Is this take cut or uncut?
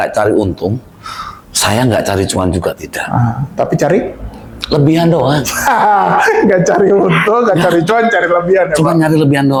uncut